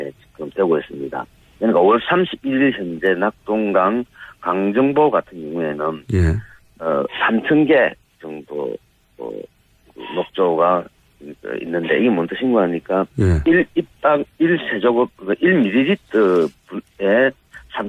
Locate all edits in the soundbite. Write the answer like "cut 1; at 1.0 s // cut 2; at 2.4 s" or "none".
cut 1; at 10.5 s